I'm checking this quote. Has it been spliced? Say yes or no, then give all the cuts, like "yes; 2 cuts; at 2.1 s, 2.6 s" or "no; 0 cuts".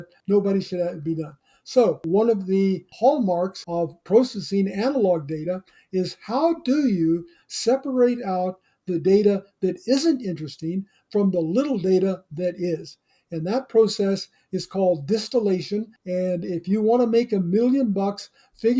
yes; 2 cuts; at 2.0 s, 3.6 s